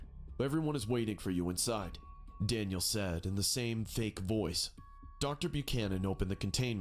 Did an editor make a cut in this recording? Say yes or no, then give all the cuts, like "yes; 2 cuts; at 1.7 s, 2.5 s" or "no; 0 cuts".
no; 0 cuts